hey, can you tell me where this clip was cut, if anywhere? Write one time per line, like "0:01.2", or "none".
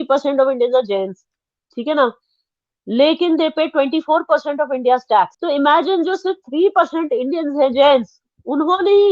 0:05.4